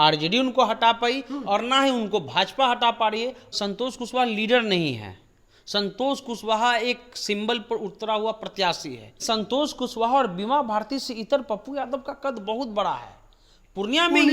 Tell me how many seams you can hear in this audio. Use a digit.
2